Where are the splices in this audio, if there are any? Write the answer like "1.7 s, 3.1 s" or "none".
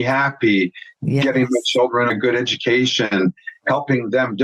2.1 s